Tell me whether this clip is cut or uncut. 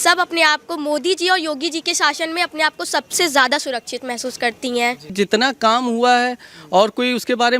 cut